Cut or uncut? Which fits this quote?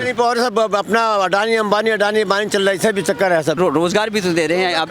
cut